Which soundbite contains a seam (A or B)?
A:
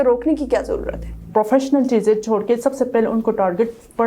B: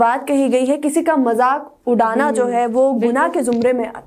A